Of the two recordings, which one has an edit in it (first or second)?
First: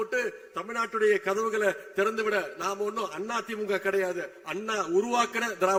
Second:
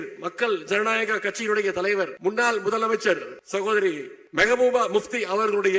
second